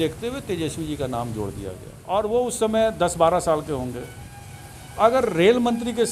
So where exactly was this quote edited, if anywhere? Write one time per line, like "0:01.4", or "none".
0:01.9